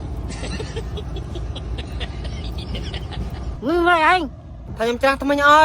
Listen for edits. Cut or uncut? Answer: cut